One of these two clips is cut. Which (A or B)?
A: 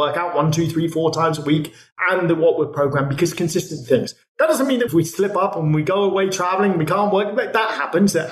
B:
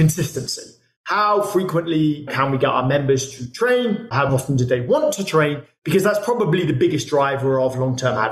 B